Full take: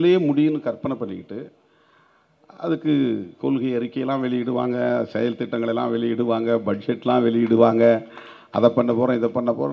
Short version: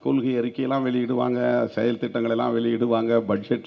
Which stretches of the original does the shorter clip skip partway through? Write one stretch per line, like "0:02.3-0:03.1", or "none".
none